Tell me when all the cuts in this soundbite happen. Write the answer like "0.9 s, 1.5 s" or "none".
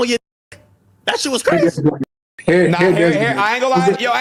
none